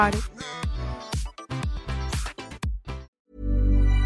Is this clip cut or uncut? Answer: cut